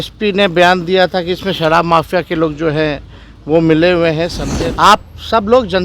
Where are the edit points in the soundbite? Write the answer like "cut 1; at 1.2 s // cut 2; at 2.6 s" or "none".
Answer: cut 1; at 4.4 s